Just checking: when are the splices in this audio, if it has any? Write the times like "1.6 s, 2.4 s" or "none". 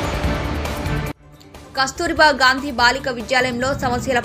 1.3 s